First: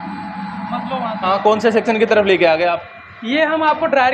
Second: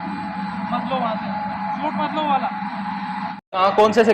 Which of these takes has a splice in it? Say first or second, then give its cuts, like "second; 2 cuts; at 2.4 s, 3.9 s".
first; 1 cut; at 1.2 s